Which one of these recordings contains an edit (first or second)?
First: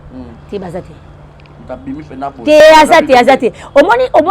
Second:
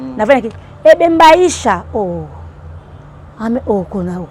first